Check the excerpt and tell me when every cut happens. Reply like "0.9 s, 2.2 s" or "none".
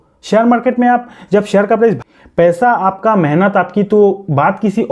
2.0 s